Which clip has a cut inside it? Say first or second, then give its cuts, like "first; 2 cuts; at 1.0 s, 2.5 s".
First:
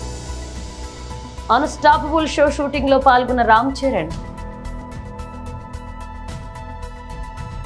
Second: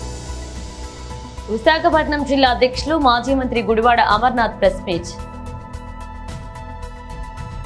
second; 2 cuts; at 1.0 s, 5.1 s